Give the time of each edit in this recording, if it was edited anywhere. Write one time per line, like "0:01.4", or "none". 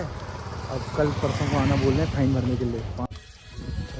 0:03.1